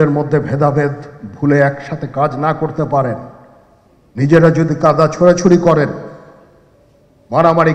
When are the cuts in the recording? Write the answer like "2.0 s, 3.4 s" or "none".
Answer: none